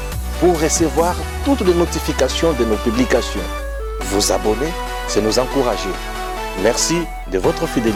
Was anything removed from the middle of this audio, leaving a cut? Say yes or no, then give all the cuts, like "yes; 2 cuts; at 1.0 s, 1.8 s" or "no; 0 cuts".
no; 0 cuts